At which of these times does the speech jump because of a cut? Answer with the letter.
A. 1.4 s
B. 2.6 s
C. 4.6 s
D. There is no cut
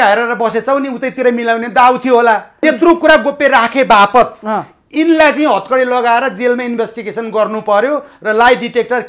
B